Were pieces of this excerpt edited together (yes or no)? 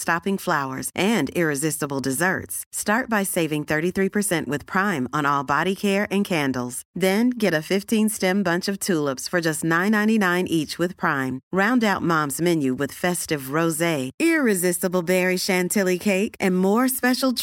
no